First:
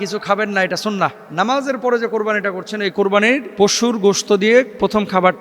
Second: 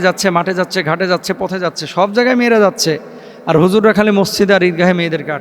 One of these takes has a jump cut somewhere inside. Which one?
first; 2 cuts; at 1.2 s, 3.5 s

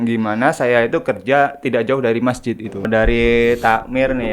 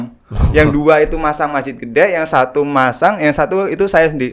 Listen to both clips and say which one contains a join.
first; 1 cut; at 2.9 s

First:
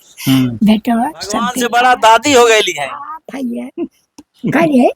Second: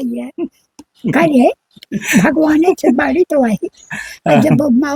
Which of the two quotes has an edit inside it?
first; 1 cut; at 1.6 s

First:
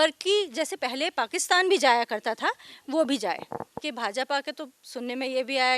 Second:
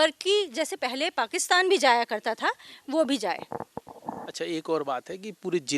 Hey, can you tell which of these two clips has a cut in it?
first; 1 cut; at 3.8 s

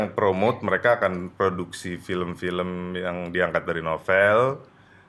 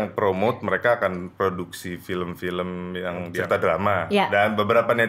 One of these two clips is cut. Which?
second; 1 cut; at 3.3 s

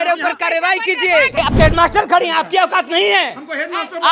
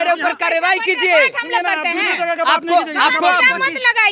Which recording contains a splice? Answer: first; 1 cut; at 1.4 s

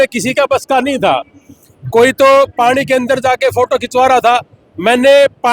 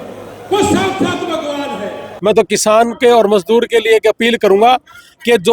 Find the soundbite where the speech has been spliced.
second; 1 cut; at 2.1 s

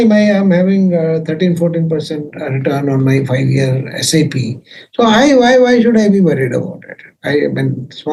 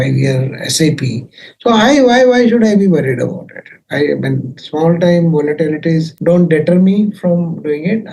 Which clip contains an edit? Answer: second; 1 cut; at 6.1 s

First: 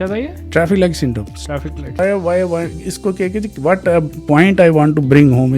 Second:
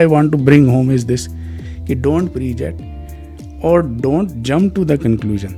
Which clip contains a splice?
first; 1 cut; at 2.0 s

